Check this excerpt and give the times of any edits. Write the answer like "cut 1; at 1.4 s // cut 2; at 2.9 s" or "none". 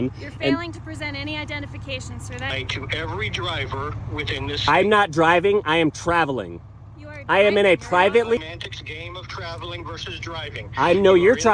cut 1; at 2.5 s // cut 2; at 8.4 s